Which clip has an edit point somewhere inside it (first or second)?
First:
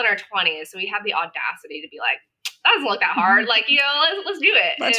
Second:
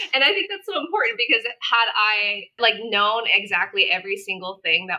second